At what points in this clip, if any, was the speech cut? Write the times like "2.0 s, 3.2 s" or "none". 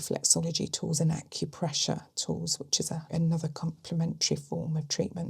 3.1 s

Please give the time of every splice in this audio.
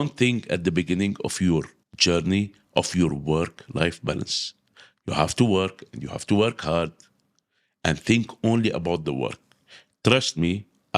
1.8 s

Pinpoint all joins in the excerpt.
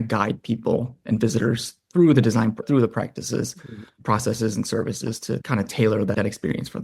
2.6 s, 5.4 s, 6.1 s

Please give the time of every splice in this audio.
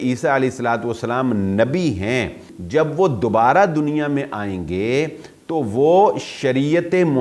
2.5 s

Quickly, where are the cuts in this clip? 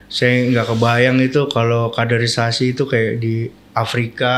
none

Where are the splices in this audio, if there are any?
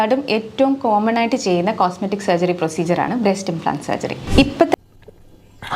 4.8 s

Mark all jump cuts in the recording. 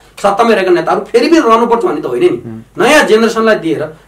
none

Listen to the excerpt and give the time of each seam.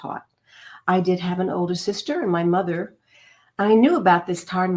none

